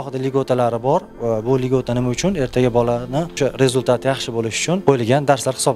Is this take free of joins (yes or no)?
no